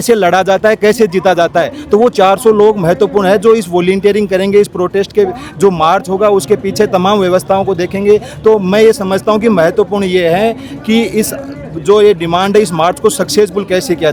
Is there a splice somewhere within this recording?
no; 0 cuts

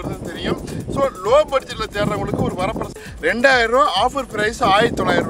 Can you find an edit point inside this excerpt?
yes; 1 cut; at 3.2 s

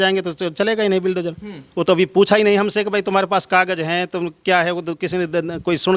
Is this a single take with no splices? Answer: yes; 0 cuts

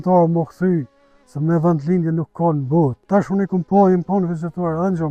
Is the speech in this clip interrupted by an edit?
yes; 1 cut; at 3.0 s

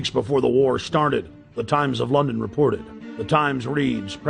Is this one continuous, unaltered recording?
no; 1 cut; at 3.4 s

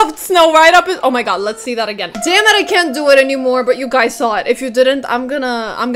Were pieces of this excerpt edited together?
no; 0 cuts

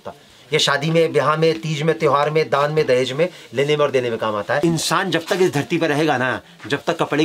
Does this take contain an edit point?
yes; 1 cut; at 4.6 s

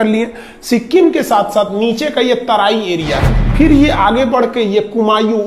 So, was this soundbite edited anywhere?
yes; 1 cut; at 3.3 s

